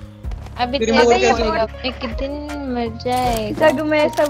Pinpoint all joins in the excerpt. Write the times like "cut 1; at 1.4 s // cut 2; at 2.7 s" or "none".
cut 1; at 1.7 s